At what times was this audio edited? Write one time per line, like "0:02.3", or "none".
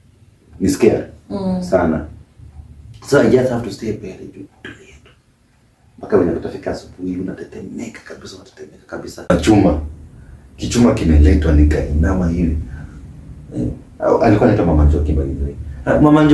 0:09.3